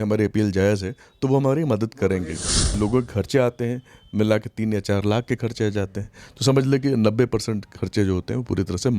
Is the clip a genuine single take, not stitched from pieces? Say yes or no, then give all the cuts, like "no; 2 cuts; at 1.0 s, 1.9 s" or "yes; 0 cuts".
no; 1 cut; at 2.7 s